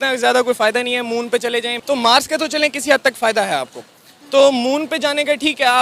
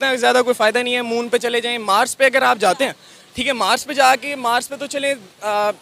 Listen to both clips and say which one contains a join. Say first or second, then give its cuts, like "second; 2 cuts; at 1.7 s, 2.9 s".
first; 1 cut; at 1.7 s